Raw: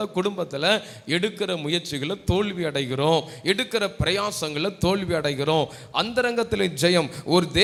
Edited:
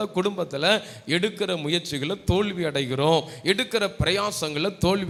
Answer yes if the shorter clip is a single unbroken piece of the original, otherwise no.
yes